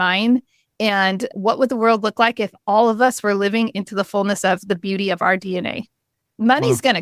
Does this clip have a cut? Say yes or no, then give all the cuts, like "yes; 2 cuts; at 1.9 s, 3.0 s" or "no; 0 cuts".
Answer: no; 0 cuts